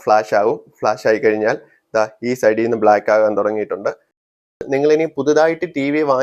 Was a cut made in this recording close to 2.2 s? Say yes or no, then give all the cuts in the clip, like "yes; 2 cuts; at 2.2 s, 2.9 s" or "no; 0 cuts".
no; 1 cut; at 4.6 s